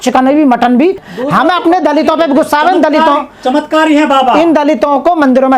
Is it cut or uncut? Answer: cut